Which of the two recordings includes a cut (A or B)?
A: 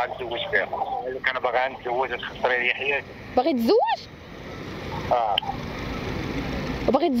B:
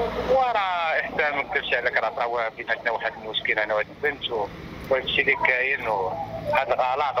A